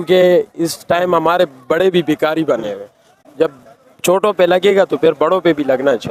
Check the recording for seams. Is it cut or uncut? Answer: uncut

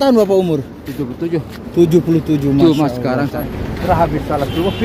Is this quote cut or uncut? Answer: cut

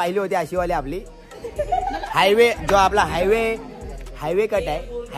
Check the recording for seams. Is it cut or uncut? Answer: uncut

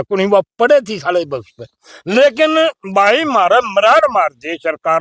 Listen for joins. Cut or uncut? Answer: uncut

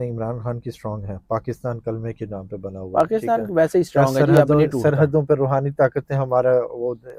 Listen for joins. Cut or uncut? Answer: uncut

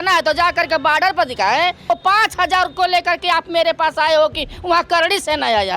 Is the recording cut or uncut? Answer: cut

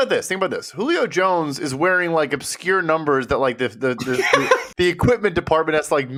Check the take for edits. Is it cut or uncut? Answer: uncut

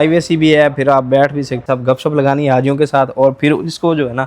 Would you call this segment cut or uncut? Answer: cut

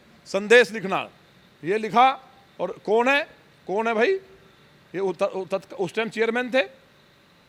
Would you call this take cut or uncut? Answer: uncut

